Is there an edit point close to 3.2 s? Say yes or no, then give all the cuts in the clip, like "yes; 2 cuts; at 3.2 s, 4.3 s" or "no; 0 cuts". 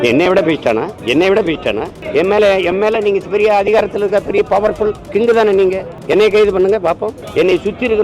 no; 5 cuts; at 1.0 s, 1.9 s, 5.0 s, 5.9 s, 7.2 s